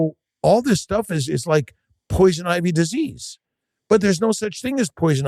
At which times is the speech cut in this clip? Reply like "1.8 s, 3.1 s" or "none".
none